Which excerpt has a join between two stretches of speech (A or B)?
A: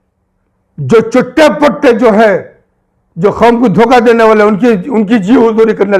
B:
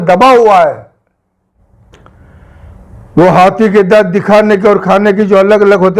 B